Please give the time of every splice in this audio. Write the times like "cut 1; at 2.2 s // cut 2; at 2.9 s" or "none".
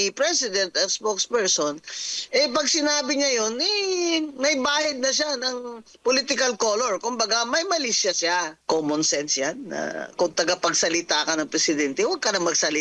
cut 1; at 8.5 s